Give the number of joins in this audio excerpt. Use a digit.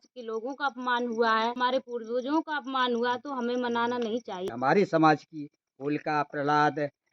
2